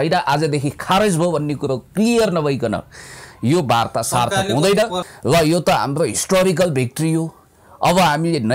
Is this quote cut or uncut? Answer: cut